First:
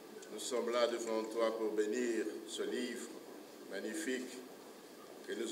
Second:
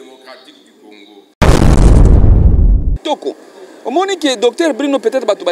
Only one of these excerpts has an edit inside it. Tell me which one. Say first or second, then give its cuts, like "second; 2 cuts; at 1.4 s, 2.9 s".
second; 2 cuts; at 1.3 s, 2.9 s